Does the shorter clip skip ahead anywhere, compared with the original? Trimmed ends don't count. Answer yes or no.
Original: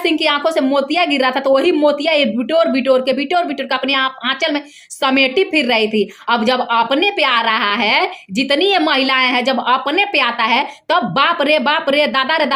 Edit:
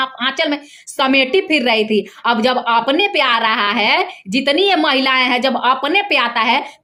no